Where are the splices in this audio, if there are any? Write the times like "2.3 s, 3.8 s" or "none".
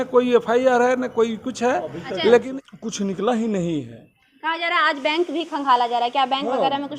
2.5 s